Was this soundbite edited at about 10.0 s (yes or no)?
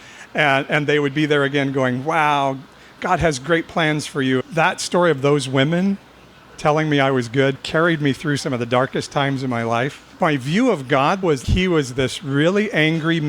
yes